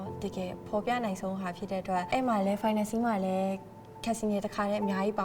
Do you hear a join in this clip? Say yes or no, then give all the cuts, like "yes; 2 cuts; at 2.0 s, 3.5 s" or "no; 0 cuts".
no; 0 cuts